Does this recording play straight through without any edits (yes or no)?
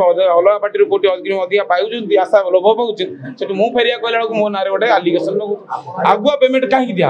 no